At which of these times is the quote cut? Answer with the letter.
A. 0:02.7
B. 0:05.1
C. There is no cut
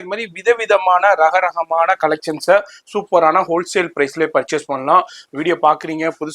C